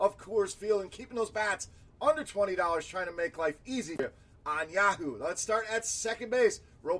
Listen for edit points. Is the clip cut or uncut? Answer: cut